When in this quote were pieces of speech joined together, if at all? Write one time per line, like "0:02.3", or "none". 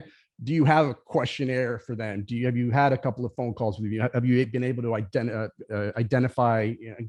none